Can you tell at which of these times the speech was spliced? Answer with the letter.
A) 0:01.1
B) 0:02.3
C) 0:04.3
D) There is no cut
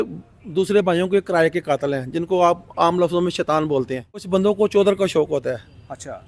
C